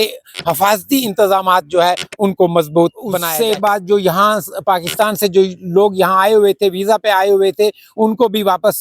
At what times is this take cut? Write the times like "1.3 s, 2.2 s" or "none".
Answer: 3.3 s